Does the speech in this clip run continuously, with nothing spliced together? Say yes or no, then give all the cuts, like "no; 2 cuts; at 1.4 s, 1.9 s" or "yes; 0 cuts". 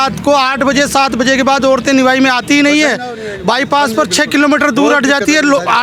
yes; 0 cuts